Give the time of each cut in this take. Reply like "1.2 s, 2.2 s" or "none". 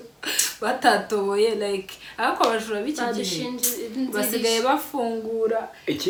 none